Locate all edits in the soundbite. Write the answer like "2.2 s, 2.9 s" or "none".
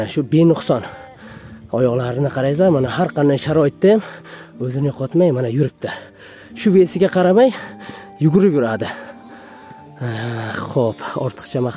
none